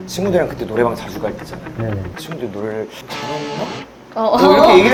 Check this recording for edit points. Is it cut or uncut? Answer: uncut